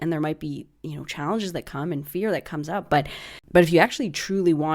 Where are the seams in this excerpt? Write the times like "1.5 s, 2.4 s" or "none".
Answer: 3.4 s